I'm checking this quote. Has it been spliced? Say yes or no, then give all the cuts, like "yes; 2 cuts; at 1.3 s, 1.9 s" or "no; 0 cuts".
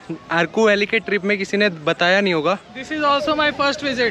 yes; 1 cut; at 2.8 s